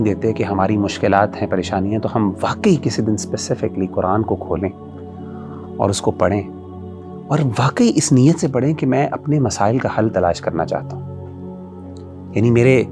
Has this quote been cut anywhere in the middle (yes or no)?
no